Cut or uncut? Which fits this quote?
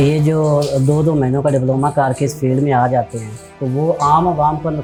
uncut